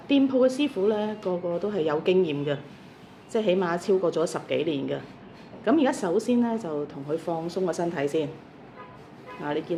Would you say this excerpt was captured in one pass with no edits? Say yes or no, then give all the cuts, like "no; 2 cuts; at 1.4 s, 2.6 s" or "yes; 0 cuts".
yes; 0 cuts